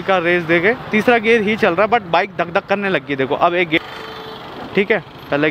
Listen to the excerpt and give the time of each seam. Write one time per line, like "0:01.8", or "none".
0:03.8